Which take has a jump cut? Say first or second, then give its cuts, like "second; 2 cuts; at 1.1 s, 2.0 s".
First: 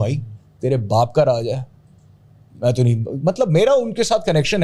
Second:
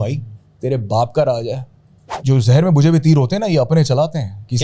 second; 1 cut; at 2.1 s